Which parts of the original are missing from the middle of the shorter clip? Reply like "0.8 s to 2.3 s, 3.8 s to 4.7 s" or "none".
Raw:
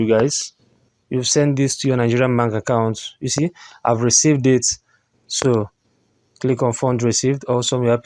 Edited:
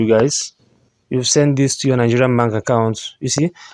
none